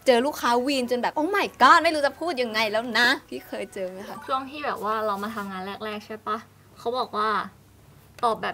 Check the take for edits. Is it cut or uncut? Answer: cut